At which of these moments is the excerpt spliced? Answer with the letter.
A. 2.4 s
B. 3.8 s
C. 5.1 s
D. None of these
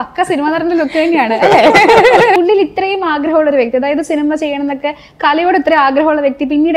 A